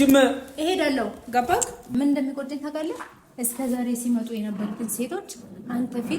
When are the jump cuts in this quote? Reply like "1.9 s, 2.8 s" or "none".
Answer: 1.9 s